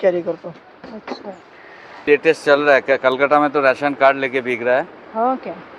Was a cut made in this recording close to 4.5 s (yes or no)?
no